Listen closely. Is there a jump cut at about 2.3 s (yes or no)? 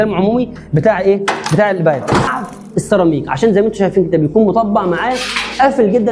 yes